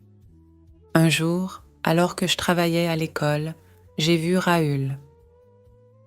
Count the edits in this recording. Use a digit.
2